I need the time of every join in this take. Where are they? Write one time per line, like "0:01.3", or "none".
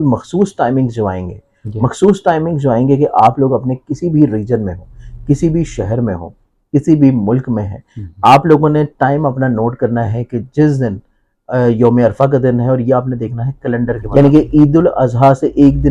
0:14.0

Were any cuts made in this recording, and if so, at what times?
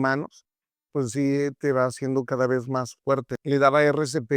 0:03.3

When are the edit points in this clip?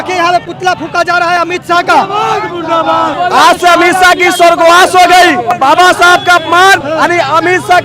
0:03.1
0:05.5
0:06.9

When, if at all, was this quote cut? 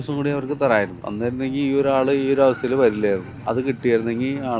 0:01.0
0:03.3

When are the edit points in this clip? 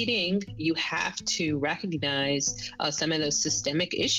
none

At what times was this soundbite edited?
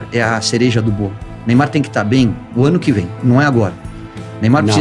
none

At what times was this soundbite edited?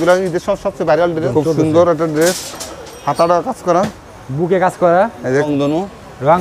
0:01.2
0:05.5

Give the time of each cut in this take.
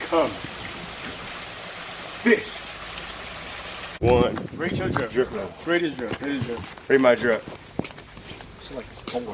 0:04.0

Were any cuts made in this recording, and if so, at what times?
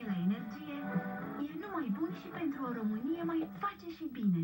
0:03.5

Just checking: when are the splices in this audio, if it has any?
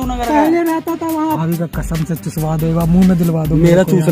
0:01.4

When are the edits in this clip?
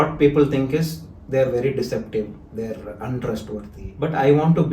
0:03.8

